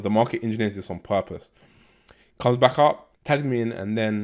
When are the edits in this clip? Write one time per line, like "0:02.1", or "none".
0:03.1